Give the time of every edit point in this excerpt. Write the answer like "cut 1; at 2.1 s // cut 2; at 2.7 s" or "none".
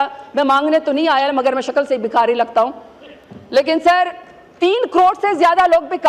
none

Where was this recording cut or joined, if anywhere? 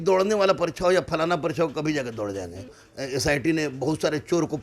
cut 1; at 2.8 s

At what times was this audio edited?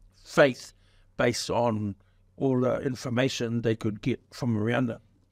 none

